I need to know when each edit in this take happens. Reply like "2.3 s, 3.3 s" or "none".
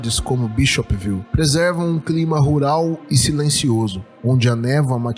1.3 s, 4.1 s